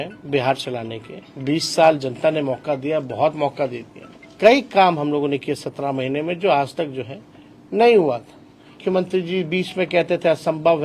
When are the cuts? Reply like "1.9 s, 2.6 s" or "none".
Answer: 4.2 s, 8.8 s